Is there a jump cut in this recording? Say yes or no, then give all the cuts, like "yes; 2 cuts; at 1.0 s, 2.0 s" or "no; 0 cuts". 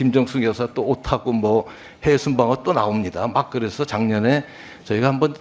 no; 0 cuts